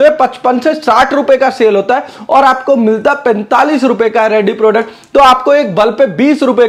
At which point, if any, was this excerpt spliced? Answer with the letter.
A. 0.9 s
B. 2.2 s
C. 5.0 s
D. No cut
D